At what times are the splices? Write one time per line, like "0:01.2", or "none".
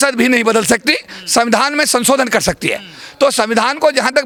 none